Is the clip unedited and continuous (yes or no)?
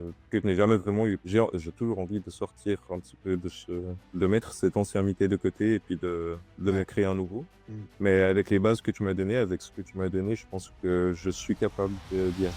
no